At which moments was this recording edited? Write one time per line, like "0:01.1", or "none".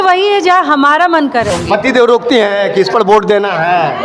0:01.5

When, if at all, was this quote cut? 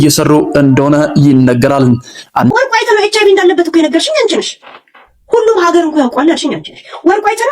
0:02.5

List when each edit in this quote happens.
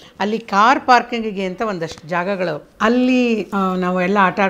0:02.7
0:03.5

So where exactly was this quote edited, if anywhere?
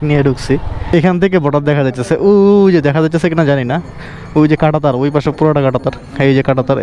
0:00.9

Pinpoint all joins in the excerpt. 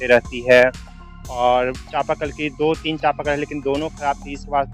none

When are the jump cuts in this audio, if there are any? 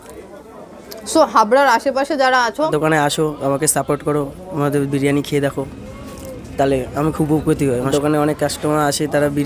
0:02.7
0:07.9

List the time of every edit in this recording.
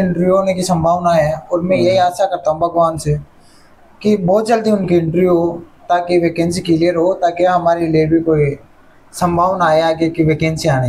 none

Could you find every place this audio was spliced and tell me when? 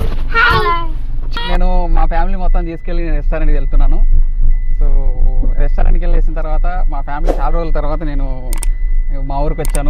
0:01.3

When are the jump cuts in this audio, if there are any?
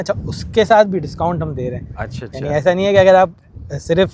none

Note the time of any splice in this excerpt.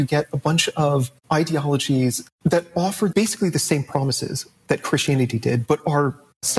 0:01.1

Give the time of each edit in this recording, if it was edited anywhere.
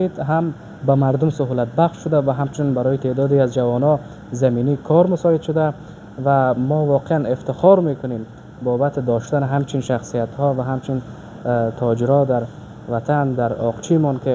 none

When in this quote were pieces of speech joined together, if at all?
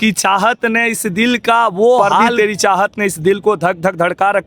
0:02.3

